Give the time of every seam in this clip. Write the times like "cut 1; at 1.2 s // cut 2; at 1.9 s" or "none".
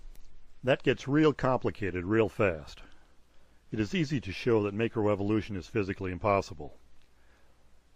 none